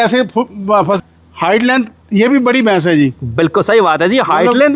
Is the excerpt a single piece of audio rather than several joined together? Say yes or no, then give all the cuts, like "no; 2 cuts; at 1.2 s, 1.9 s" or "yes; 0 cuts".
no; 1 cut; at 1.0 s